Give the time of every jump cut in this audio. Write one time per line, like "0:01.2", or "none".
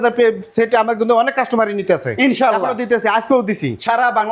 none